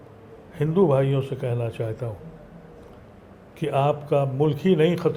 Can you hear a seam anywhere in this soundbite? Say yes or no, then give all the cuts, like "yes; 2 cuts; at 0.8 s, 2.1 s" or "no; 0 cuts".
no; 0 cuts